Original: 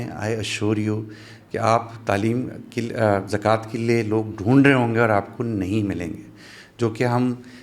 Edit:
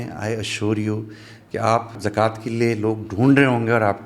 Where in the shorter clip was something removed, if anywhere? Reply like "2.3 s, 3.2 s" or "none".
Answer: 2.0 s

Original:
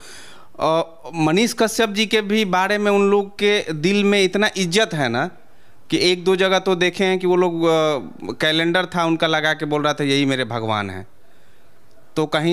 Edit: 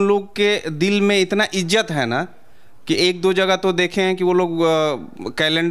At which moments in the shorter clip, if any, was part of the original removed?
none

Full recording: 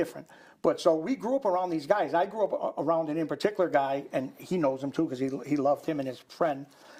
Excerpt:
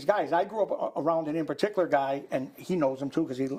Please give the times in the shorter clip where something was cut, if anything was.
none

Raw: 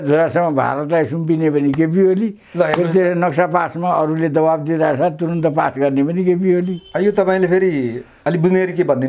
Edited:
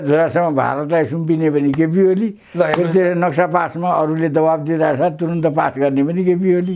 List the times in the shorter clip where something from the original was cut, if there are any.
none

